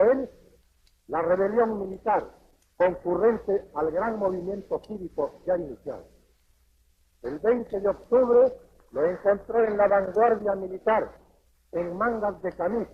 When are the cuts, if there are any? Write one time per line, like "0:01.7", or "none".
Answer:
0:09.4

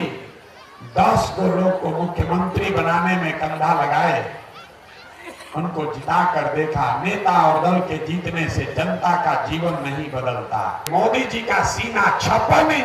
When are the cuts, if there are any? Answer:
0:10.8

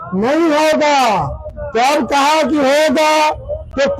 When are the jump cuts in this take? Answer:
none

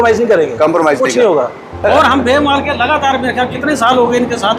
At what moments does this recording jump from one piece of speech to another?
0:01.8

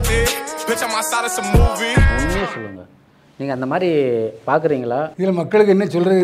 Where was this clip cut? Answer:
0:05.1

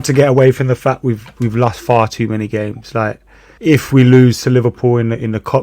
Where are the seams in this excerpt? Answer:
0:03.4

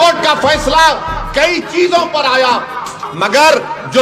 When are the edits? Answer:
0:03.0

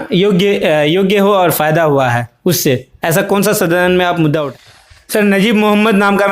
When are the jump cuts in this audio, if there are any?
0:04.5

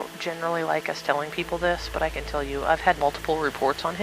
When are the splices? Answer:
0:03.0

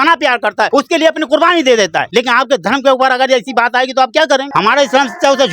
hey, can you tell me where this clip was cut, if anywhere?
0:02.0
0:04.5

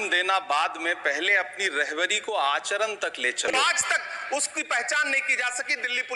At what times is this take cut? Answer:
0:03.5

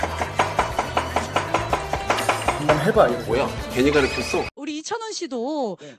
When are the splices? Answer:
none

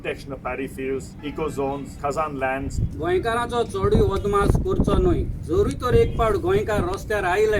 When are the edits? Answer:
0:01.6
0:02.8

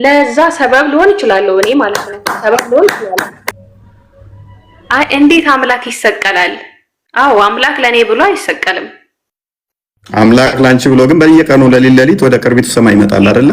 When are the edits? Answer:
0:03.6

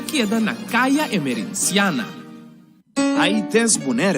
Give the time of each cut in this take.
0:01.2

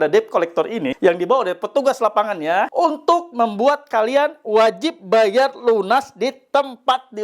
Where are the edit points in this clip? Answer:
0:00.9
0:02.7

